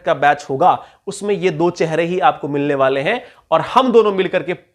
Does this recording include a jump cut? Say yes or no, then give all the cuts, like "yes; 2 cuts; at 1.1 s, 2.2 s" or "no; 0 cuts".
no; 0 cuts